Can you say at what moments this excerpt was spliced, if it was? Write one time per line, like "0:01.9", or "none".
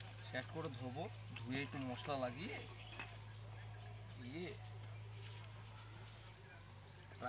none